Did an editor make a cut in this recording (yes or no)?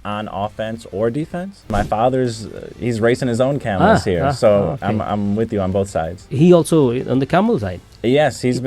yes